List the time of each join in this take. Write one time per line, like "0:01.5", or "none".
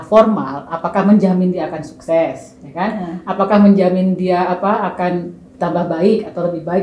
none